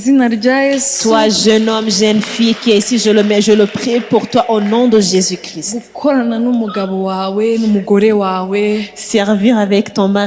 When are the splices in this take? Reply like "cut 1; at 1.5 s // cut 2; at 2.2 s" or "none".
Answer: none